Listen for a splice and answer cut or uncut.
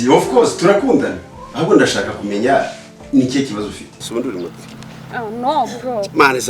cut